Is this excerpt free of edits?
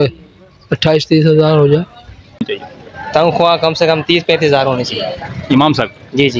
no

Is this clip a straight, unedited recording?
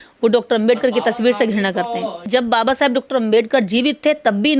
no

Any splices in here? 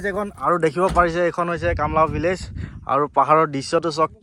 no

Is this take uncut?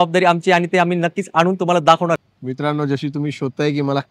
no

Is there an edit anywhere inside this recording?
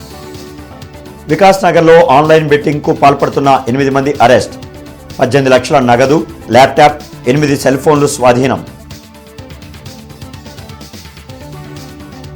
no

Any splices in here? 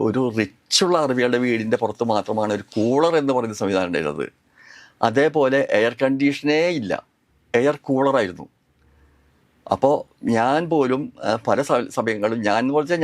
no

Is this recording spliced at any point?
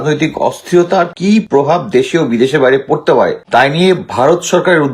yes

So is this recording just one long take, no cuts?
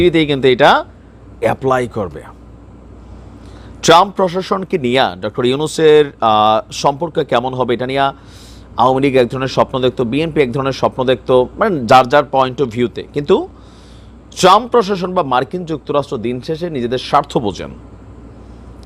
yes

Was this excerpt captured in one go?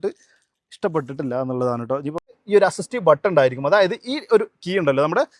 no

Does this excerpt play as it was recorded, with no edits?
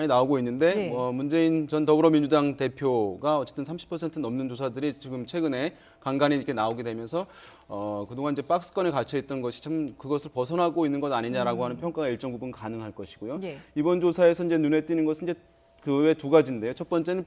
no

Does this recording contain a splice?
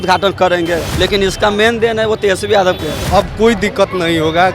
yes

